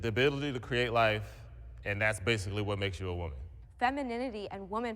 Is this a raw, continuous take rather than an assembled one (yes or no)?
no